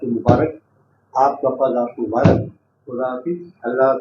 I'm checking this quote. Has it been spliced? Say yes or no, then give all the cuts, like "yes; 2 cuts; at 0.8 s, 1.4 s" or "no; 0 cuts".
no; 0 cuts